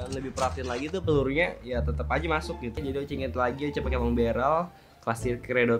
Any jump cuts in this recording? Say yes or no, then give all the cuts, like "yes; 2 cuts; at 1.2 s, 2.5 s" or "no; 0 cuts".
yes; 1 cut; at 2.8 s